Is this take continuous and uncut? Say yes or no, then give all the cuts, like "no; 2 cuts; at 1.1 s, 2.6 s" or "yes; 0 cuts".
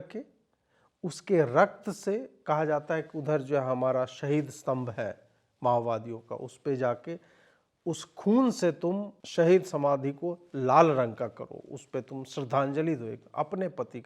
no; 1 cut; at 9.2 s